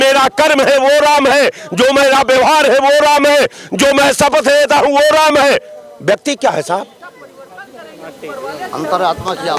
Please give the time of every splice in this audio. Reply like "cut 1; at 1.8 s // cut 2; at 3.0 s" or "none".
none

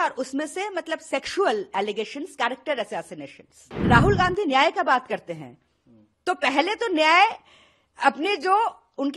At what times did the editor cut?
cut 1; at 3.7 s

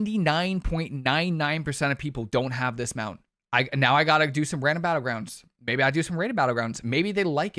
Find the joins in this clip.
cut 1; at 3.3 s

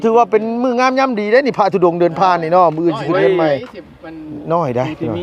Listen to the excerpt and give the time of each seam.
none

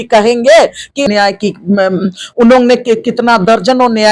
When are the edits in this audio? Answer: cut 1; at 1.0 s

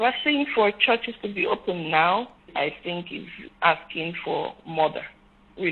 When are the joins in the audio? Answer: cut 1; at 2.5 s // cut 2; at 3.4 s

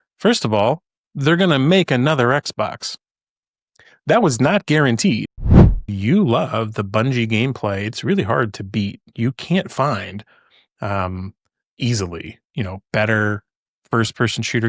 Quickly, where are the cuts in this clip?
cut 1; at 5.8 s

